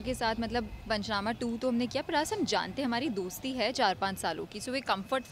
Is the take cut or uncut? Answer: uncut